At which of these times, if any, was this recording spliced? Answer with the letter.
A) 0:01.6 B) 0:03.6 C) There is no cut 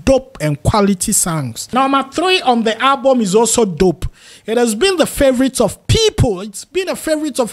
A